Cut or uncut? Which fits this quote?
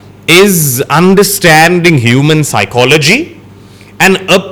uncut